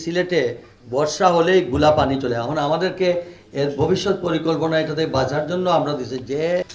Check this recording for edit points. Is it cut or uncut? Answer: uncut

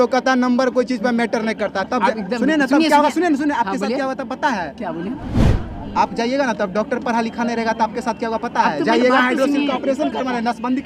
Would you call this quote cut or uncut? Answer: uncut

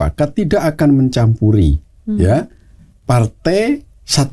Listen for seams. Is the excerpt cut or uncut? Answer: uncut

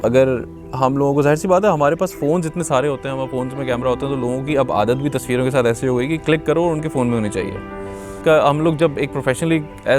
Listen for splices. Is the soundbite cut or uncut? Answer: cut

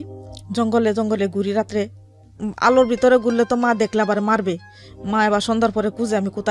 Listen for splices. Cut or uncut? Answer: uncut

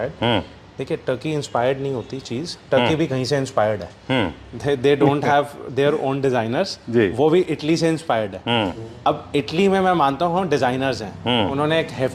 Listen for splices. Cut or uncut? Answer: uncut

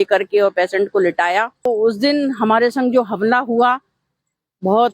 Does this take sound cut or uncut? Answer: cut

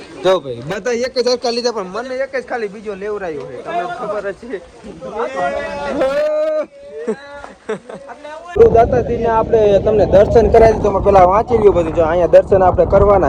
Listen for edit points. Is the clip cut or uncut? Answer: cut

